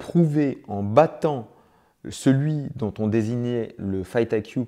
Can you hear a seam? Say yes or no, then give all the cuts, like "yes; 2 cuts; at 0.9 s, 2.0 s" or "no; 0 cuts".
no; 0 cuts